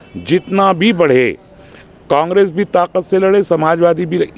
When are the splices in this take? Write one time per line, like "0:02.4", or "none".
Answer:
none